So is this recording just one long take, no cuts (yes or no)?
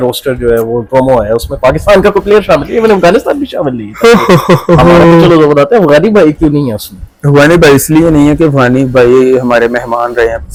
yes